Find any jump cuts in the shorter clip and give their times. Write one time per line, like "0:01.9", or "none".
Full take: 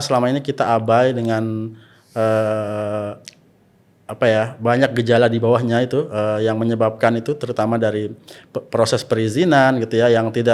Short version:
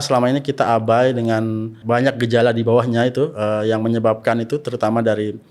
0:01.8

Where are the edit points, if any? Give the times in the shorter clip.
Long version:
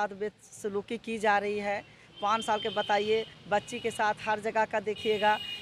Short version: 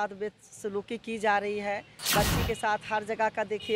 0:02.0

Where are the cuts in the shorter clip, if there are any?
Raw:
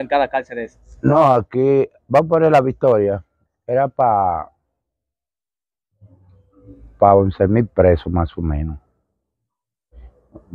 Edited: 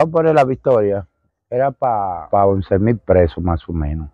0:02.2

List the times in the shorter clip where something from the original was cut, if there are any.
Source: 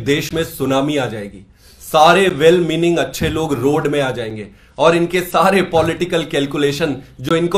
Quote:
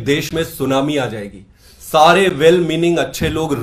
none

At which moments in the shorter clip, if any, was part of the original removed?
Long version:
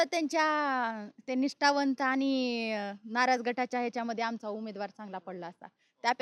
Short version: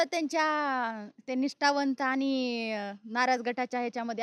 none

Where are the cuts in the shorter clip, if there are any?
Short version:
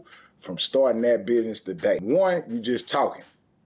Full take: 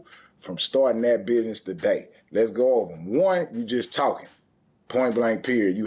0:02.0

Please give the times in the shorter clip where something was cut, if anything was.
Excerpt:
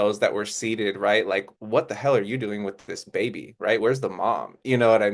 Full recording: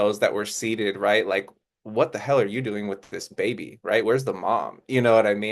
0:01.5

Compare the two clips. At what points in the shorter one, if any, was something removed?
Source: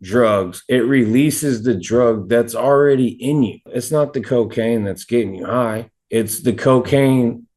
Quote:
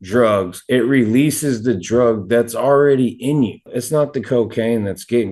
none

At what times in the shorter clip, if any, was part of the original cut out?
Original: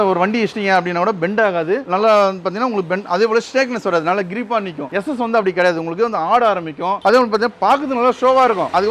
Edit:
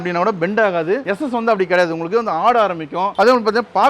0:01.0

